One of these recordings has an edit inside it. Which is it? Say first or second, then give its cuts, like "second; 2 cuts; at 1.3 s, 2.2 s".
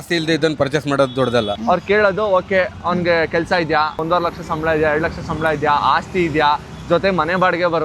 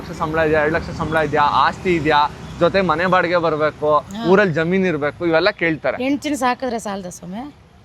first; 1 cut; at 1.6 s